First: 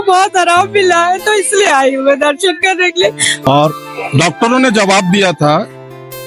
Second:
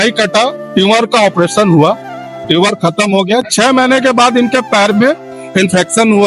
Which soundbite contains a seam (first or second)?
first